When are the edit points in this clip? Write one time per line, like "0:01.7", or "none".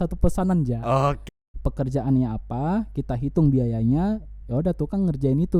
0:01.2